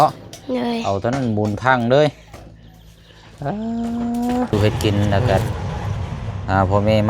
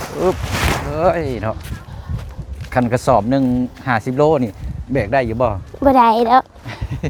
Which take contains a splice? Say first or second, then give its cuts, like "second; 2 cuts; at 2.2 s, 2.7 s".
first; 1 cut; at 4.5 s